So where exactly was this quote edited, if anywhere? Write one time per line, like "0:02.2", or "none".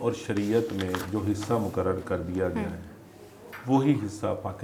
none